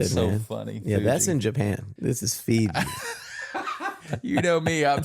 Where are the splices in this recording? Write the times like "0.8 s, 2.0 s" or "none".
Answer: 1.9 s, 3.8 s